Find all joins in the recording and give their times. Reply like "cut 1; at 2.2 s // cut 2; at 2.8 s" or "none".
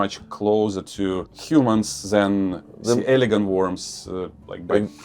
cut 1; at 1.3 s